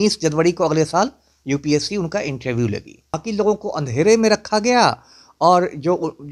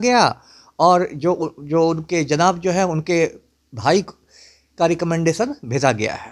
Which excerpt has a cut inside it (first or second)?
first